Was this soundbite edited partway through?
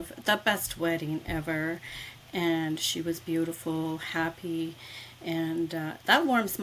no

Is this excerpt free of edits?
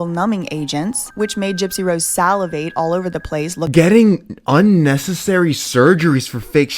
no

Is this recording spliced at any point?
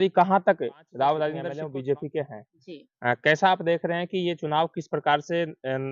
yes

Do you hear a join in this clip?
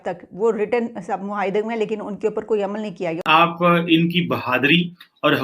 yes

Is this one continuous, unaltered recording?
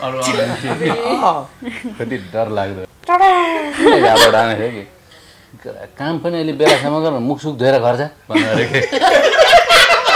no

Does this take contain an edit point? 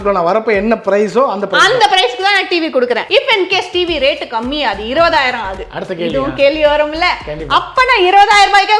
yes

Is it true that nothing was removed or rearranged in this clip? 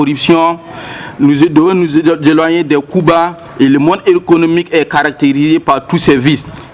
yes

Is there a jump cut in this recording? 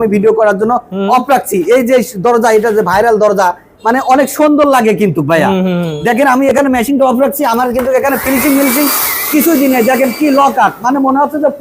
no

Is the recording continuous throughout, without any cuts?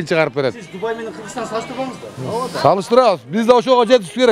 yes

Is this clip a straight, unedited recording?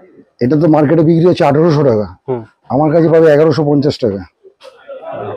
yes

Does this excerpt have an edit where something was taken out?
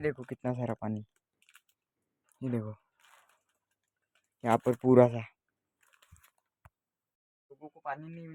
no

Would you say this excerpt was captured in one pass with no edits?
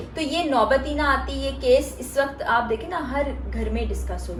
yes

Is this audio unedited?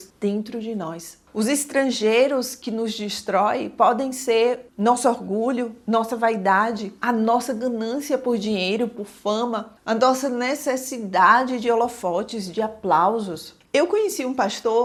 yes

